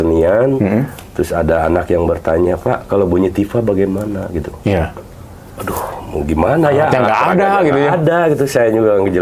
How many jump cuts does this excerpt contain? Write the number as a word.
zero